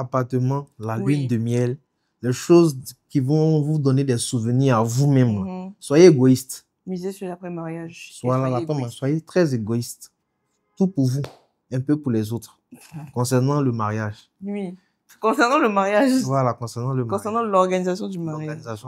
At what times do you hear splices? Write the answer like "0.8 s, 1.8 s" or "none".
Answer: none

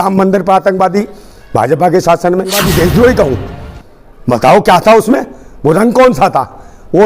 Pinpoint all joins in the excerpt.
2.6 s

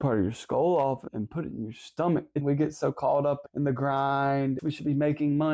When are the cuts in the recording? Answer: 1.1 s, 2.4 s, 3.4 s, 4.6 s

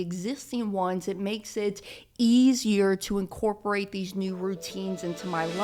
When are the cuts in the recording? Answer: none

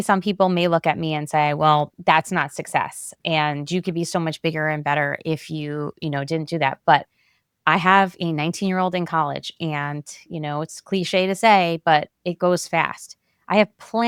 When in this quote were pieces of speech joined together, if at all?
none

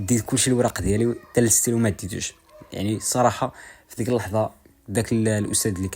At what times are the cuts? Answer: none

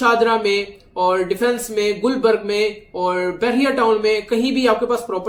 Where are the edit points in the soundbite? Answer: none

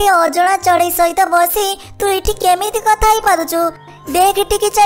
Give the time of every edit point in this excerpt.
3.8 s

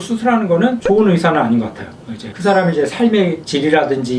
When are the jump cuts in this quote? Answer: 2.3 s

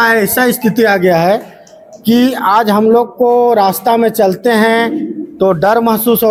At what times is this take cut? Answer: none

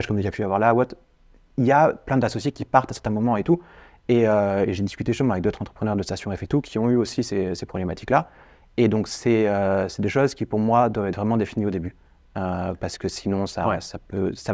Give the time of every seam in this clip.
none

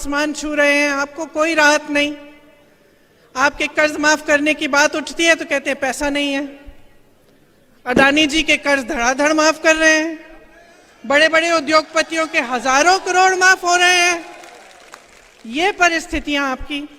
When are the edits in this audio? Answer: none

